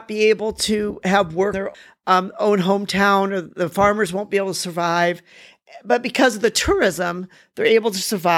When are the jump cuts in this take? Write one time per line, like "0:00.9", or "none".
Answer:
0:01.6